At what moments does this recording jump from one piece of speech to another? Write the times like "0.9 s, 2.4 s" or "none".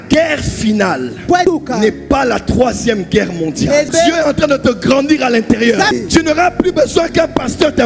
3.9 s, 5.9 s